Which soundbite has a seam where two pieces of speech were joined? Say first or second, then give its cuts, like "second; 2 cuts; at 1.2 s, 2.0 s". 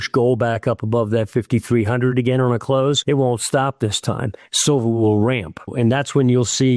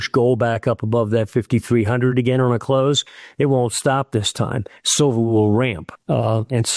first; 2 cuts; at 3.0 s, 5.7 s